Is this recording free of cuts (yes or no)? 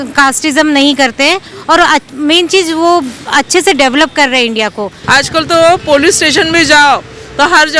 no